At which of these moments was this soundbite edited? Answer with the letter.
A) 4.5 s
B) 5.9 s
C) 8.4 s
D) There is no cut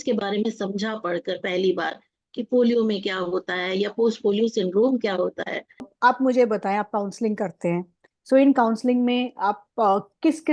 B